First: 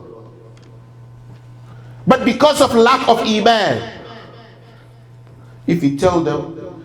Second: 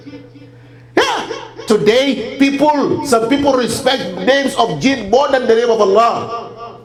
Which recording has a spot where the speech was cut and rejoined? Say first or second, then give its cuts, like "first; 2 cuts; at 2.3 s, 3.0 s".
first; 1 cut; at 1.7 s